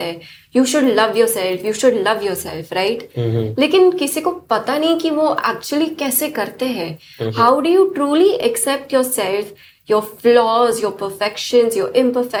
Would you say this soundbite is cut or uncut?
uncut